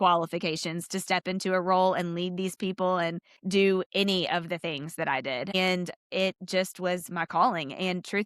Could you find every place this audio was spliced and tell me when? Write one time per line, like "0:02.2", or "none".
0:03.3
0:05.6